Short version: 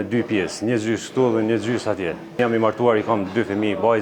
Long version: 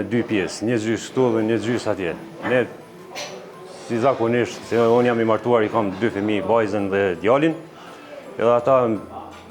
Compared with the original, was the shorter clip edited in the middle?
yes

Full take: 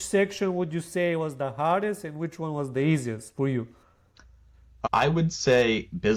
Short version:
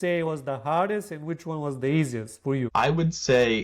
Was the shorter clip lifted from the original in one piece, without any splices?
no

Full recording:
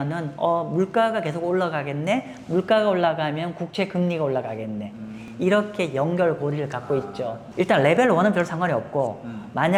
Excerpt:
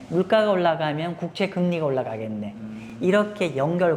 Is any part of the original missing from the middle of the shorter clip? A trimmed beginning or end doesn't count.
no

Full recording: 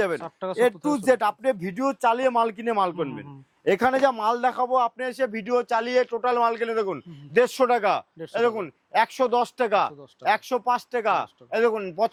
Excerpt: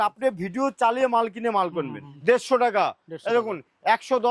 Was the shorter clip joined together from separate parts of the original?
yes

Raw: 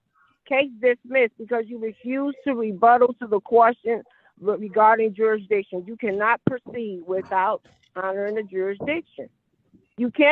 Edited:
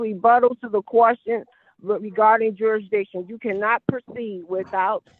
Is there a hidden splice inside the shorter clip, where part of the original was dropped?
no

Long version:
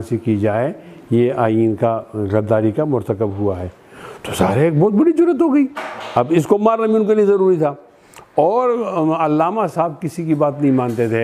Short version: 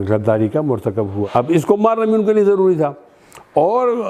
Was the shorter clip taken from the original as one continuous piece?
no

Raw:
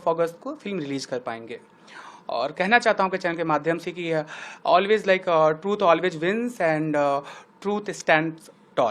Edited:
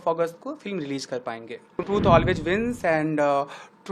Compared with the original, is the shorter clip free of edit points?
no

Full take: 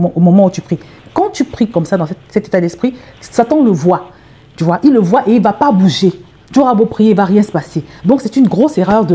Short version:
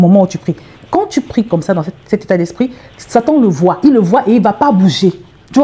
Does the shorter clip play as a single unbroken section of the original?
no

